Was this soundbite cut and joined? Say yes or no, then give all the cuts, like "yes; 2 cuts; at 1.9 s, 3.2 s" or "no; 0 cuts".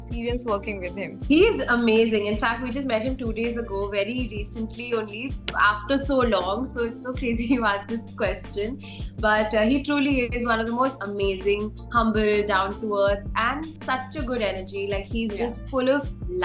no; 0 cuts